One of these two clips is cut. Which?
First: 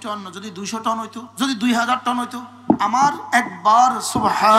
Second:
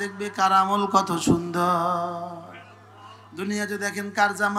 first; 1 cut; at 1.2 s

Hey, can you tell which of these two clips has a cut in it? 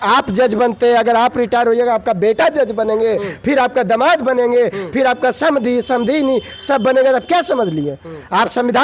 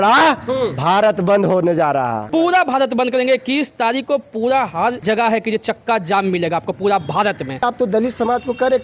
second; 3 cuts; at 2.2 s, 5.0 s, 7.6 s

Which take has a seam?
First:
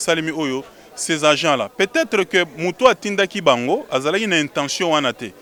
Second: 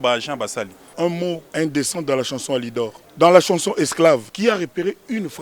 second; 3 cuts; at 1.1 s, 3.0 s, 4.3 s

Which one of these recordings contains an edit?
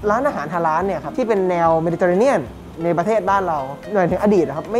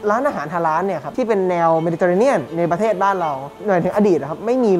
second; 1 cut; at 2.5 s

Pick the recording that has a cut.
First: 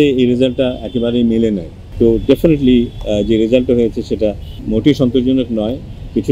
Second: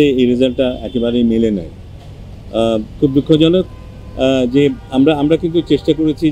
first; 2 cuts; at 1.8 s, 4.5 s

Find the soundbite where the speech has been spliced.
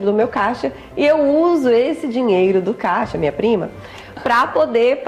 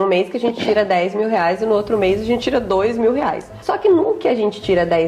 second; 1 cut; at 3.5 s

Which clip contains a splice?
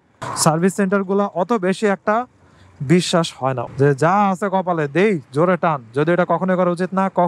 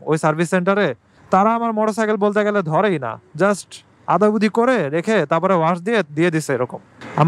first; 1 cut; at 3.6 s

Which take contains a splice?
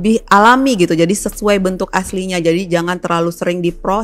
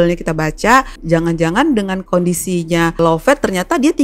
second; 3 cuts; at 1.0 s, 2.0 s, 3.0 s

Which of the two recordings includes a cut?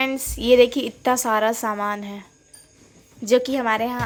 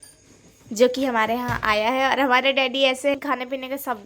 second; 1 cut; at 3.1 s

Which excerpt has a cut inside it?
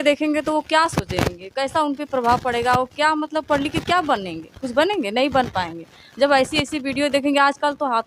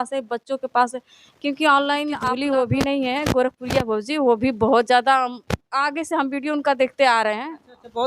second; 1 cut; at 2.2 s

